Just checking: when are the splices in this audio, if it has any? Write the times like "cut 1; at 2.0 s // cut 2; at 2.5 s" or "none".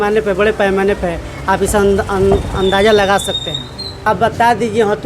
cut 1; at 3.9 s